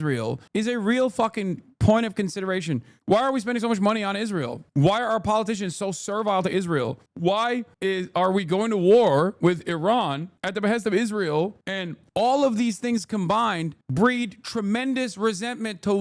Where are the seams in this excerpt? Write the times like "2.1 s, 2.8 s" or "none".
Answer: 2.9 s, 12.0 s